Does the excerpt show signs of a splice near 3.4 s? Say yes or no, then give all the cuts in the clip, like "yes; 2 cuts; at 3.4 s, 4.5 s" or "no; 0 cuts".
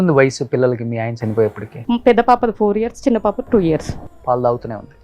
no; 1 cut; at 1.7 s